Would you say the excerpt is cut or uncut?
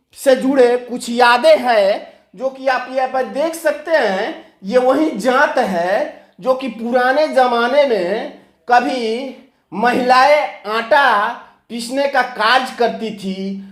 uncut